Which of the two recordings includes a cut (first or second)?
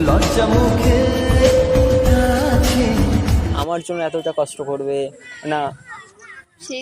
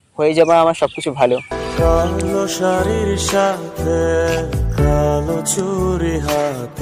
first